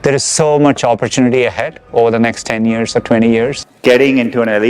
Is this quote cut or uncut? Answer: cut